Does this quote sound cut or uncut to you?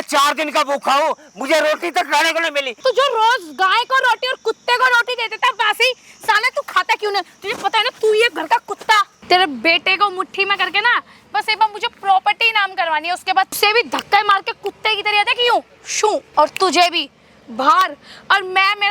cut